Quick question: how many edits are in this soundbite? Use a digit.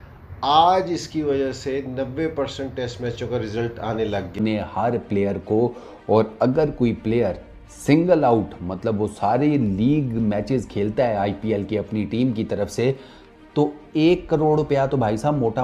1